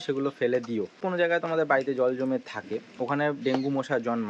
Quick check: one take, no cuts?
no; 1 cut; at 1.0 s

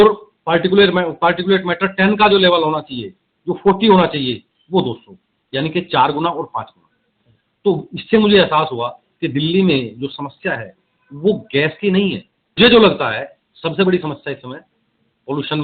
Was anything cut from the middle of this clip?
yes; 1 cut; at 12.6 s

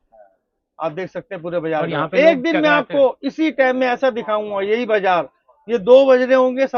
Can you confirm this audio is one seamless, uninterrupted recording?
yes; 0 cuts

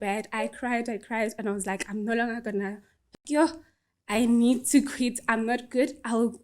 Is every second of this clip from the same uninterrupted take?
no; 1 cut; at 3.1 s

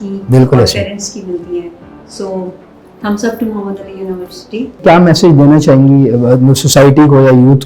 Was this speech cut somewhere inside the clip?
yes; 1 cut; at 4.8 s

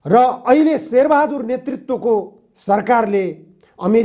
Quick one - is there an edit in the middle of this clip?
no; 0 cuts

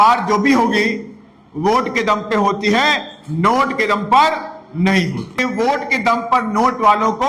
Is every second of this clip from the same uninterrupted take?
no; 1 cut; at 5.4 s

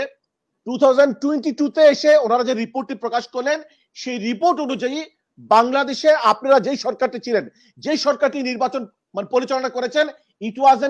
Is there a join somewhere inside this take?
no; 0 cuts

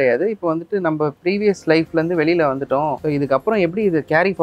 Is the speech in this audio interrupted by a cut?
yes; 1 cut; at 3.0 s

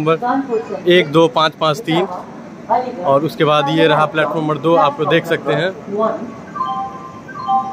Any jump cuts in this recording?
no; 0 cuts

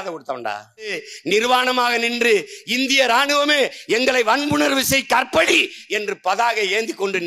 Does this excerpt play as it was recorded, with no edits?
no; 1 cut; at 1.1 s

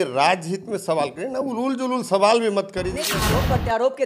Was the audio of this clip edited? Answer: yes; 1 cut; at 3.1 s

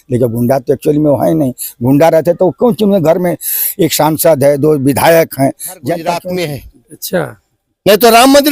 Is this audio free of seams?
no; 1 cut; at 6.1 s

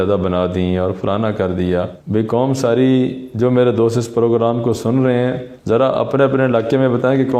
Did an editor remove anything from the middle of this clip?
no; 0 cuts

